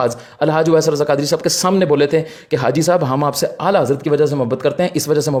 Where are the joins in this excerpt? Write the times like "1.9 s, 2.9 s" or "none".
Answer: none